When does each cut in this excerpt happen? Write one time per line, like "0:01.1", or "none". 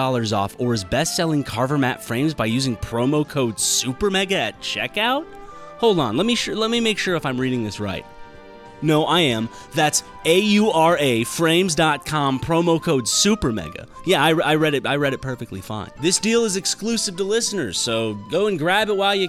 none